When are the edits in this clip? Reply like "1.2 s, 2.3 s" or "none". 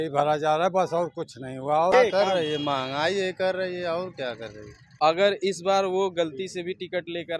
1.9 s, 5.0 s